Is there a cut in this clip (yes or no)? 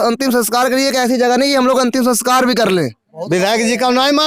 yes